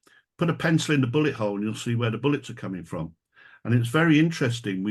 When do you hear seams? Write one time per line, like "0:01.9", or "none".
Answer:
none